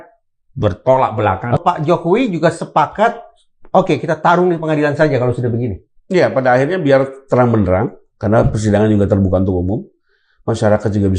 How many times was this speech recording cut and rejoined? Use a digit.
1